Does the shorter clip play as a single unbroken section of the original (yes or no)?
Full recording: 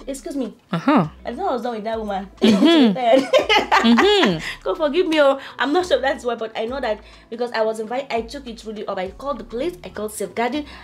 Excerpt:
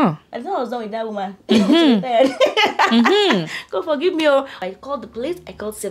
no